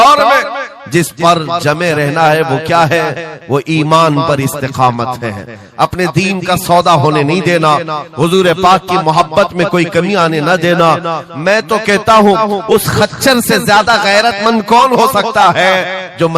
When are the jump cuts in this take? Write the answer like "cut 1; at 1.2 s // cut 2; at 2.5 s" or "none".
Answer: none